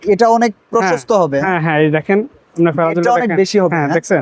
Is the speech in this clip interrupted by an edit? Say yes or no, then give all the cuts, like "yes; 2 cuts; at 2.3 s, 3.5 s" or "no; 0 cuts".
no; 0 cuts